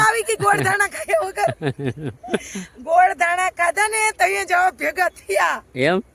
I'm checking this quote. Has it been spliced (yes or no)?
no